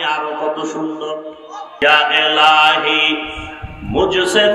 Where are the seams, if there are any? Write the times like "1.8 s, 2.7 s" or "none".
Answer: 1.8 s